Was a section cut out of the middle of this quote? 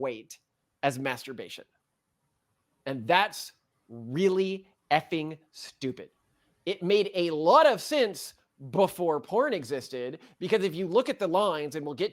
no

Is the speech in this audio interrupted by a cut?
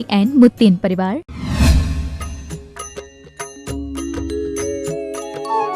yes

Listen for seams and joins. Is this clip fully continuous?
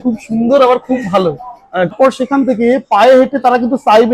no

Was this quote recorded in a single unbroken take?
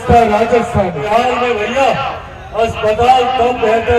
no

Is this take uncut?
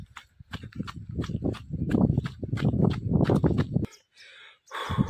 no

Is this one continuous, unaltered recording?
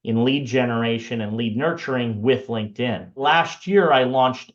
no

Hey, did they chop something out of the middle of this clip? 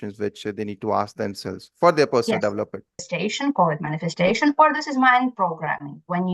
yes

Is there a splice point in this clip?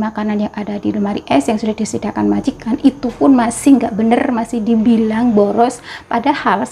no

